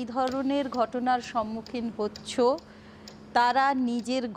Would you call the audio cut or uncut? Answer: uncut